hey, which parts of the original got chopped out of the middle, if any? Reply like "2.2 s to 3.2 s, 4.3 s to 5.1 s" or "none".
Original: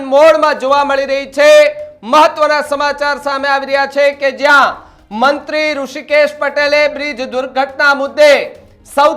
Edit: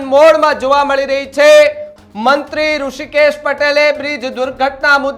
1.9 s to 4.9 s